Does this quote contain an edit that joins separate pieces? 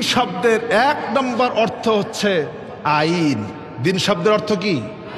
no; 0 cuts

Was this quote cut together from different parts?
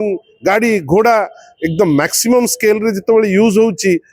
no; 0 cuts

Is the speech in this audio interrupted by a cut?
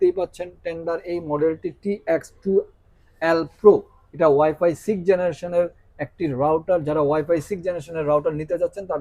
no; 0 cuts

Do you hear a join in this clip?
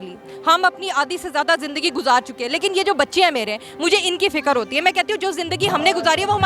no; 0 cuts

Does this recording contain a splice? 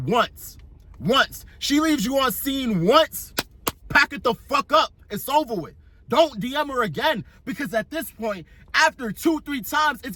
no; 0 cuts

